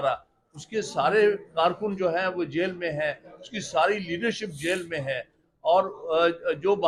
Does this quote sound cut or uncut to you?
uncut